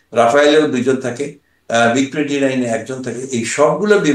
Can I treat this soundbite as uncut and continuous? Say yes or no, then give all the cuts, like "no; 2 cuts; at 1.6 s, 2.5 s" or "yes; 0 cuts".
yes; 0 cuts